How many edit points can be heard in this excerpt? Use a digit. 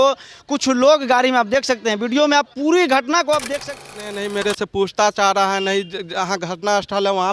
1